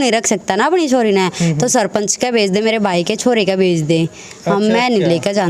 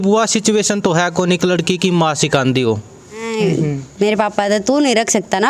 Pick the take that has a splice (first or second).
second